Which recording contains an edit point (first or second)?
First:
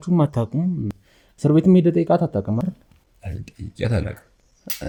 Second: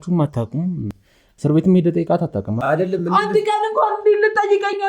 second